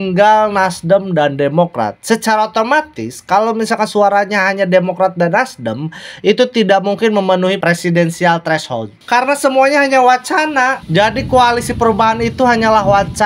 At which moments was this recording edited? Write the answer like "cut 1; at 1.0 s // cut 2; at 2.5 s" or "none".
cut 1; at 8.9 s